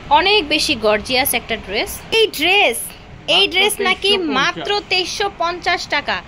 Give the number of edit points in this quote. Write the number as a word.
one